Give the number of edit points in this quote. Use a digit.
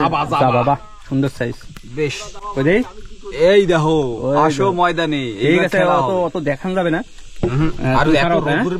0